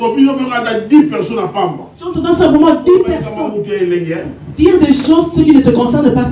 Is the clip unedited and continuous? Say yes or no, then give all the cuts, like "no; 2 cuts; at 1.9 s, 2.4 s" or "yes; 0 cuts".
no; 1 cut; at 3.3 s